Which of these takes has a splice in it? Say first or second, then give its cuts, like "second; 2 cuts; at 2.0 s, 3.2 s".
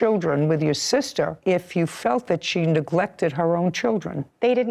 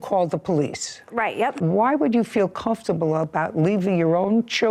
second; 1 cut; at 1.6 s